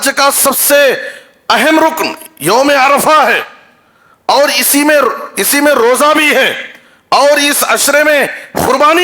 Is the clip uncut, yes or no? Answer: yes